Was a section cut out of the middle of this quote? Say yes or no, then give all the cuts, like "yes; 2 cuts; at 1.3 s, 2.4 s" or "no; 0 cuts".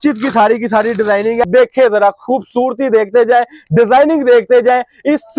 yes; 1 cut; at 1.4 s